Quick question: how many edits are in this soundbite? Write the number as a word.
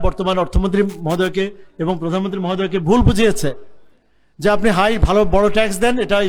zero